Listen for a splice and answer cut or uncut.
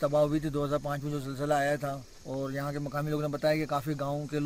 uncut